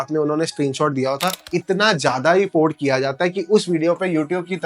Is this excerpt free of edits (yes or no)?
no